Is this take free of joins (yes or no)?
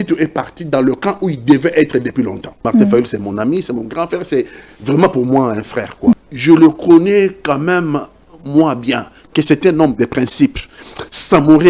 no